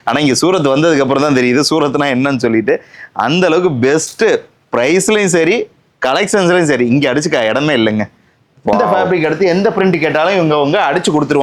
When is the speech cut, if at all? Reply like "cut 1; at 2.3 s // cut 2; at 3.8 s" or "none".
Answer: cut 1; at 8.8 s

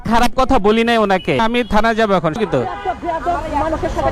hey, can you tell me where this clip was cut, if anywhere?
cut 1; at 1.4 s // cut 2; at 2.4 s

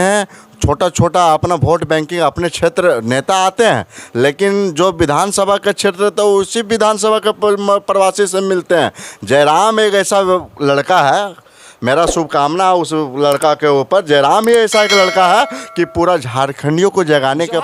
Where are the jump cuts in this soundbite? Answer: none

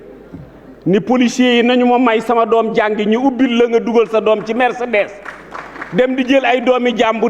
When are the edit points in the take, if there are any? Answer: none

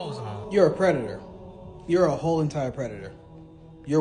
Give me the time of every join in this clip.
none

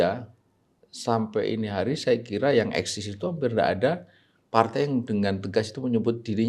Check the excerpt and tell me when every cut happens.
none

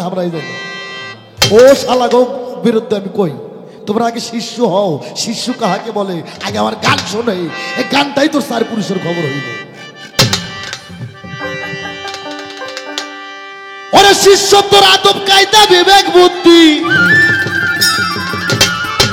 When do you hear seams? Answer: none

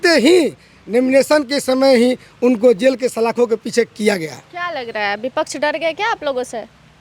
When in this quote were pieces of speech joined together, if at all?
none

